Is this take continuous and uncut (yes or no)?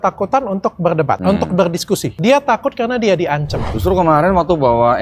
no